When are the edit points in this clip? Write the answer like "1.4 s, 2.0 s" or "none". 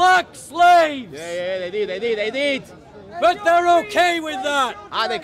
none